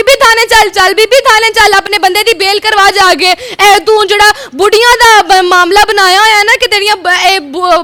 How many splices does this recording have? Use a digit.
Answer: 0